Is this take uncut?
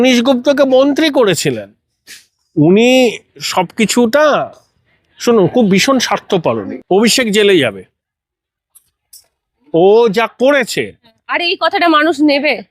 no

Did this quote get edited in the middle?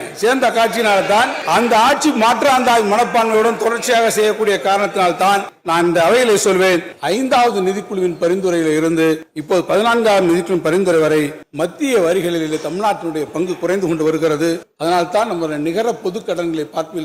no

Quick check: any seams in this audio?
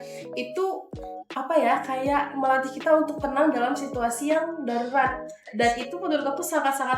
no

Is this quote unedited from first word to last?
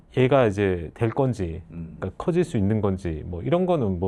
yes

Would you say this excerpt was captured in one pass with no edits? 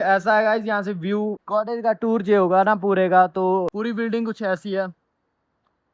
no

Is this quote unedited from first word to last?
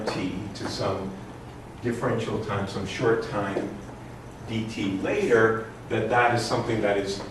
no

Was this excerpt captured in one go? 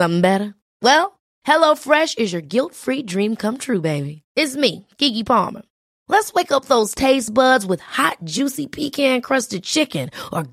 yes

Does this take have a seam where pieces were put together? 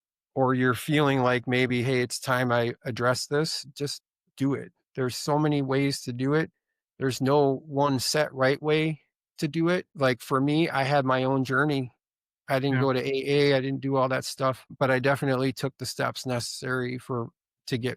yes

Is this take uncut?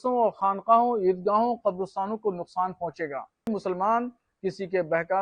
no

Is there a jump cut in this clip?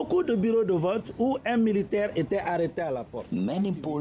no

